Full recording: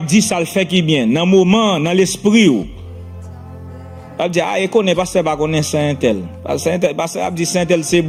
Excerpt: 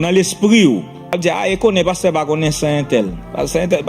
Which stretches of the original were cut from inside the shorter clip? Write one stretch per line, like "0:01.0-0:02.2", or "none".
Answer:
0:02.8-0:04.1